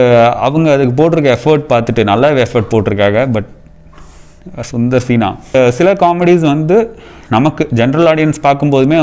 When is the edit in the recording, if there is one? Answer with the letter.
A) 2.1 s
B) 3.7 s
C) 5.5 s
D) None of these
C